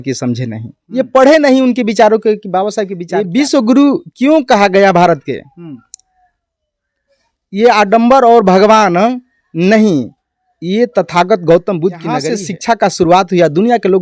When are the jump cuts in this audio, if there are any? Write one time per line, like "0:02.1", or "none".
0:02.9
0:12.3